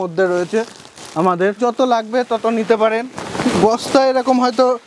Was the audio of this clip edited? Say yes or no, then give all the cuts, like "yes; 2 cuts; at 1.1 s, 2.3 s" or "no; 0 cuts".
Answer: yes; 2 cuts; at 1.6 s, 3.2 s